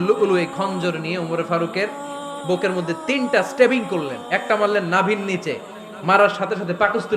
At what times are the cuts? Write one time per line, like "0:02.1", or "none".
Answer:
none